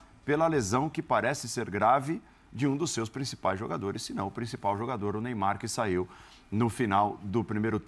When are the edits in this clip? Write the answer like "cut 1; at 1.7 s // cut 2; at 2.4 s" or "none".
none